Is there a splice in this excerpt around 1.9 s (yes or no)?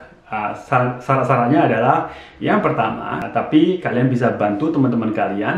no